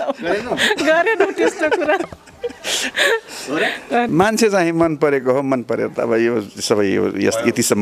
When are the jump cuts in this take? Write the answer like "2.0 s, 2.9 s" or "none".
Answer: 4.1 s

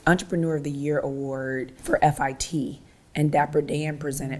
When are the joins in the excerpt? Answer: 1.8 s

